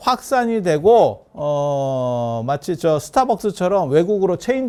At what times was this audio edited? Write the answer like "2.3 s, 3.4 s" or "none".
none

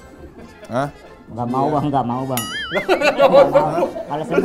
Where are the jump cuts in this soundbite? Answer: 1.2 s

